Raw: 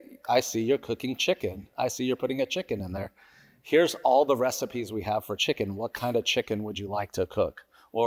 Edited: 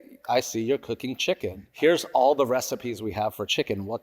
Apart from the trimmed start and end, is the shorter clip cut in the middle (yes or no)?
yes